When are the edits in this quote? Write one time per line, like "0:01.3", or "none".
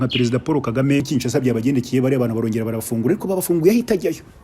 0:01.1